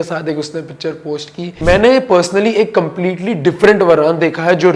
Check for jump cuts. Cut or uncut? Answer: cut